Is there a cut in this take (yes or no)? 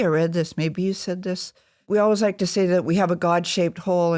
yes